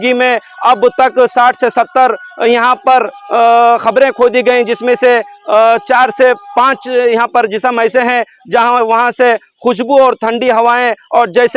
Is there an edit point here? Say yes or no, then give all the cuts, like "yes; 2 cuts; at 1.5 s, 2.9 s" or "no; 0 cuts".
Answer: no; 0 cuts